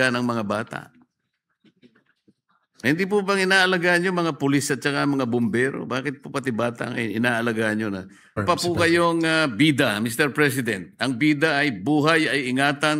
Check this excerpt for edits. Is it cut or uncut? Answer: cut